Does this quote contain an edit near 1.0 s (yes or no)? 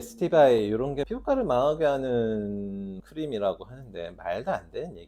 yes